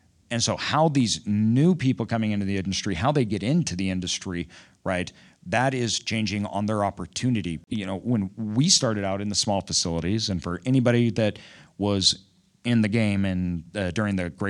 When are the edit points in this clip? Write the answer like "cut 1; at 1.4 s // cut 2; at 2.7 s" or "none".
cut 1; at 7.6 s

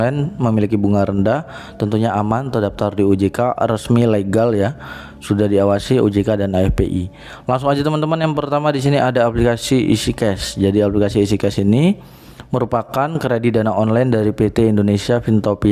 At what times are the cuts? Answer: none

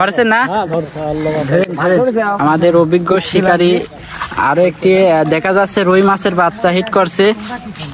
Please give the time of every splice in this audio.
cut 1; at 2.4 s

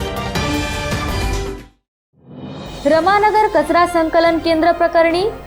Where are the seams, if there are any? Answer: cut 1; at 2.6 s

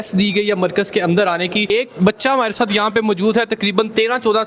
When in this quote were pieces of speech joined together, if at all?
cut 1; at 1.7 s

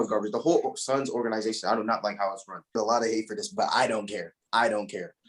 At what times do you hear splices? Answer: cut 1; at 2.7 s

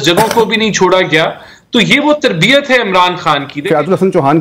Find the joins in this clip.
cut 1; at 3.5 s

